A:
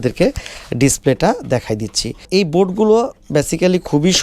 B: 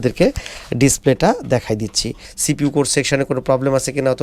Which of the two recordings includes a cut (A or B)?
B